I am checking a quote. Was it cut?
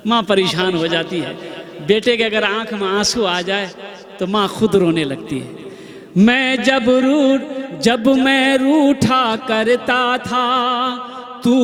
no; 0 cuts

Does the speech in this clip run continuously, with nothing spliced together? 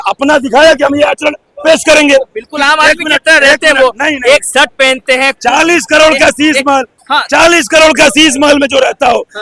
yes; 0 cuts

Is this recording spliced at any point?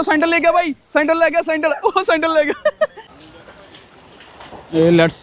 yes; 1 cut; at 3.0 s

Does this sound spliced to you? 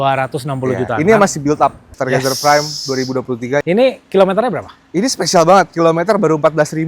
yes; 2 cuts; at 1.9 s, 3.6 s

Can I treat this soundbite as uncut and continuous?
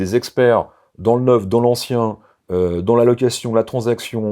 yes; 0 cuts

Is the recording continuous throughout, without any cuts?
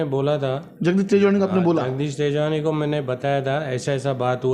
yes; 0 cuts

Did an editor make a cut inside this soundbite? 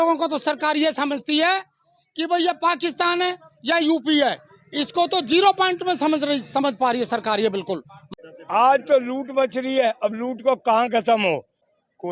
yes; 1 cut; at 8.0 s

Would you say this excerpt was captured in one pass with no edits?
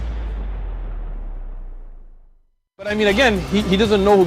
yes; 0 cuts

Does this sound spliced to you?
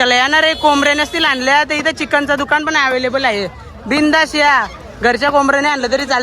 no; 0 cuts

